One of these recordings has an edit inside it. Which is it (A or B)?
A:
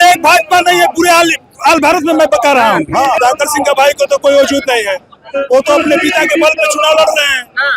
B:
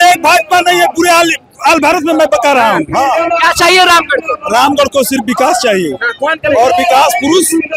A